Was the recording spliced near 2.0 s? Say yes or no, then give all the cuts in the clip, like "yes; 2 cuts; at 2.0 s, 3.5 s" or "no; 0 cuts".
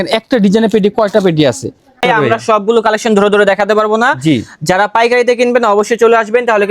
yes; 1 cut; at 2.0 s